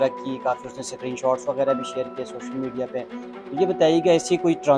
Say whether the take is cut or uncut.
uncut